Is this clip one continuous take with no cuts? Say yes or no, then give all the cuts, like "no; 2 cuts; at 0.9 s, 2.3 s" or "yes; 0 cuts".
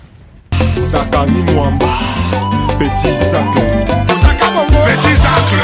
yes; 0 cuts